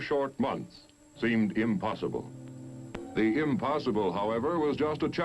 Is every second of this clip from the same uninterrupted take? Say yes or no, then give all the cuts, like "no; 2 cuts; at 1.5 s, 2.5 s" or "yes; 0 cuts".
no; 1 cut; at 1.5 s